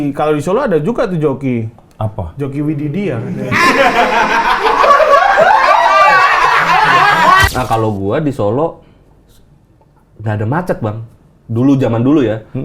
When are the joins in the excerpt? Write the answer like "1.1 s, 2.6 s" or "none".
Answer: 7.5 s